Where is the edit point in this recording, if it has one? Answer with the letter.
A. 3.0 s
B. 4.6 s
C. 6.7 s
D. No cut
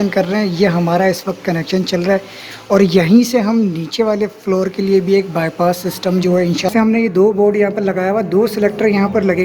C